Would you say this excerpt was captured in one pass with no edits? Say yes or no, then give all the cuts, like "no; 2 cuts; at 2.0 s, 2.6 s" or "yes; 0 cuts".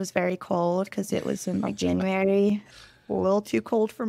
no; 1 cut; at 2.7 s